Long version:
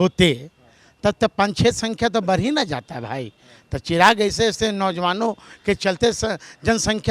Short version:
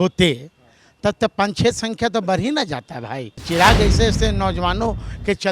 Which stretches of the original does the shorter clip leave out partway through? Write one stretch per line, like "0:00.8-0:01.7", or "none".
0:03.3-0:03.7

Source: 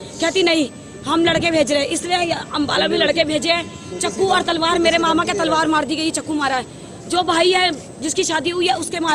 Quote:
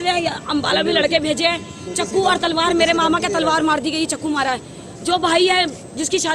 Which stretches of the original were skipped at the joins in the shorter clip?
none

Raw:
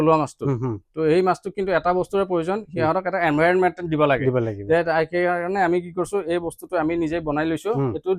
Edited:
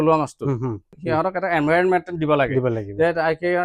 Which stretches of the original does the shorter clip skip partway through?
0:00.9-0:02.6

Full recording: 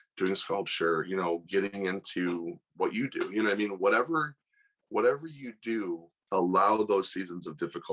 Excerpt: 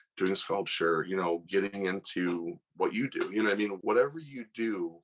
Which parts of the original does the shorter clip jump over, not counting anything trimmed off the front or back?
0:03.7-0:04.8

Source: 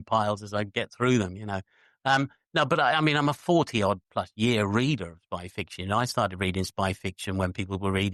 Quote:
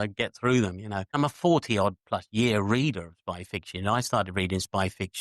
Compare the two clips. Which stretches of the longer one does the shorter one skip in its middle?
0:01.7-0:03.2

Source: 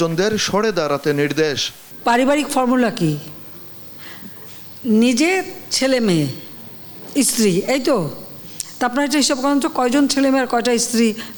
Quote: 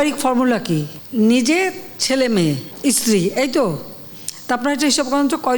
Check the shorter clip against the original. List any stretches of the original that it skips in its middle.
0:03.3-0:04.7
0:06.4-0:07.0

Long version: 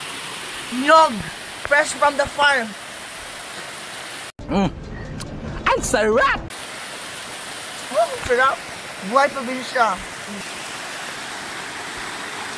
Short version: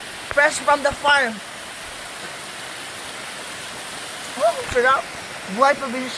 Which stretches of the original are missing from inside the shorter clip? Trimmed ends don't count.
0:04.3-0:06.5

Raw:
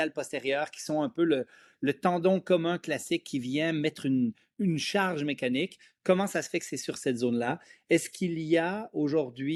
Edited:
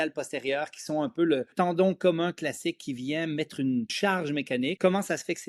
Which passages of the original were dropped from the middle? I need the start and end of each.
0:01.5-0:02.0
0:04.9-0:05.7

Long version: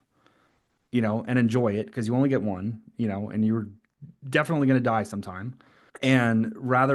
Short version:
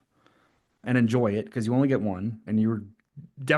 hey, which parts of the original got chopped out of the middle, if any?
0:00.8-0:01.2
0:02.8-0:03.3

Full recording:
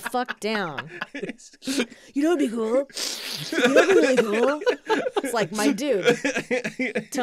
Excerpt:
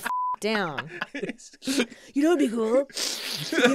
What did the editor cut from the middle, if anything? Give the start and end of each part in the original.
none

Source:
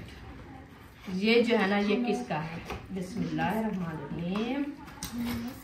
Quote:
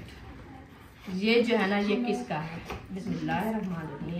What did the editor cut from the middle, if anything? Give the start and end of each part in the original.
0:03.0-0:03.1

